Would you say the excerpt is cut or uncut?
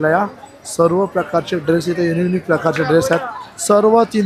uncut